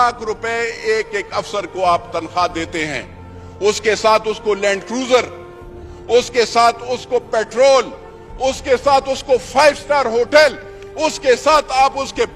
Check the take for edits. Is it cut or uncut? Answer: uncut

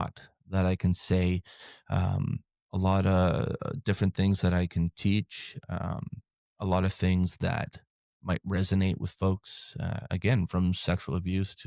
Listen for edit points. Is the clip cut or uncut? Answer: uncut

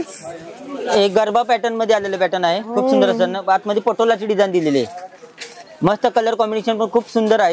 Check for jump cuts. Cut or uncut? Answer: uncut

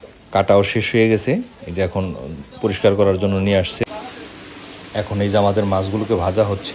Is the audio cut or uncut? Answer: cut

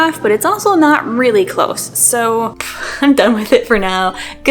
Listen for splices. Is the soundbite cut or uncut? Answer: cut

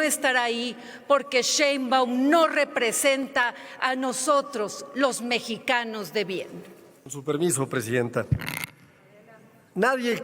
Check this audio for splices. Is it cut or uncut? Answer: uncut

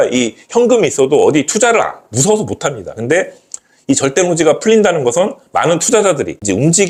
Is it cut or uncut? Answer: uncut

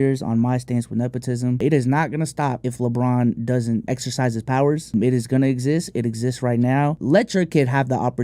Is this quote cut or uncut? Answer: cut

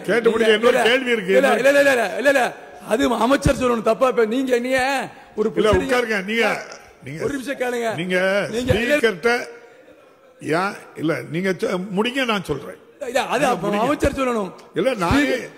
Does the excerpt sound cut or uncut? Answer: uncut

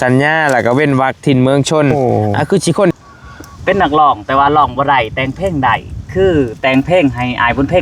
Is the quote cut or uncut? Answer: cut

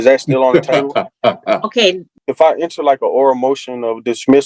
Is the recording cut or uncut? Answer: cut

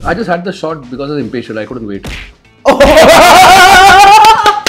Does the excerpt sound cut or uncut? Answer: uncut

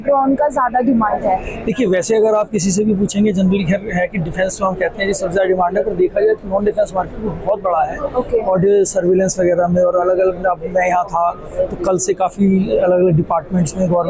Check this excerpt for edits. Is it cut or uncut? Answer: uncut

